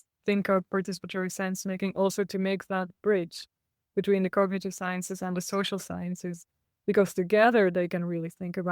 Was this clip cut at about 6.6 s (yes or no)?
no